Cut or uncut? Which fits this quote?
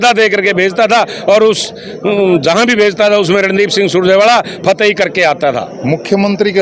cut